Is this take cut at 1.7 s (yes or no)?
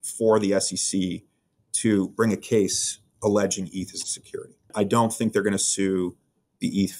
no